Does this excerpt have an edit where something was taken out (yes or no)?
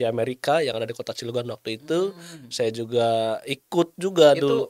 no